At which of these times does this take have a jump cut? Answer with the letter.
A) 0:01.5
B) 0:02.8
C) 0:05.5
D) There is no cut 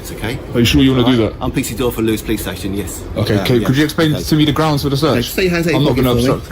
D